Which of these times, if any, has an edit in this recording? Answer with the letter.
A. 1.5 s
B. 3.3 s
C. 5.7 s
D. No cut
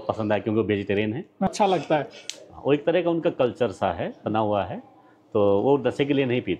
A